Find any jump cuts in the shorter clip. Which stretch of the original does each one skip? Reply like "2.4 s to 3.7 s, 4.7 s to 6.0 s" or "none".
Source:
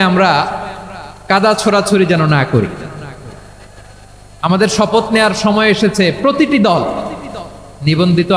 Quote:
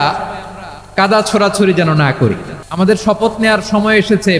2.9 s to 4.3 s